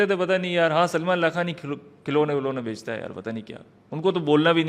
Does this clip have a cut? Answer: no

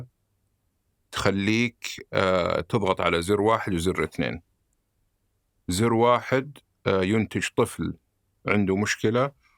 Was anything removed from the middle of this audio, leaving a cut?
no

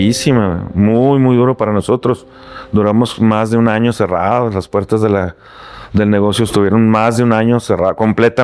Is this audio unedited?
yes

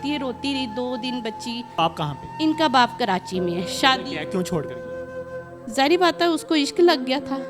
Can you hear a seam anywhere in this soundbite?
yes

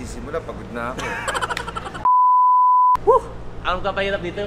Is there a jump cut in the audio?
yes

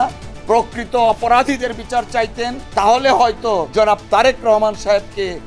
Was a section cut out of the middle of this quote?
yes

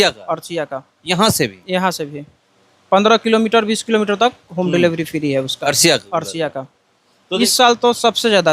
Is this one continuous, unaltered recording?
no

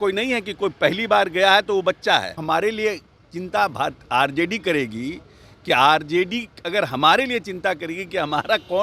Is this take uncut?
no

